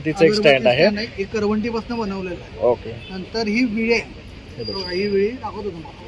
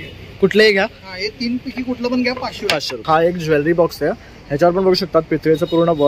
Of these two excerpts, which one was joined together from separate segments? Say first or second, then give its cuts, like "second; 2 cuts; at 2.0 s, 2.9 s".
second; 1 cut; at 3.0 s